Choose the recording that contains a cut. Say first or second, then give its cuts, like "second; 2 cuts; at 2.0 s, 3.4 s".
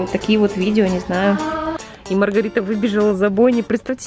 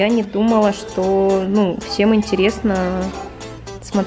first; 1 cut; at 1.8 s